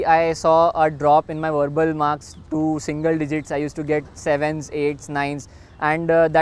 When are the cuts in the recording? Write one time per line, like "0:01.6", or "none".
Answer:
none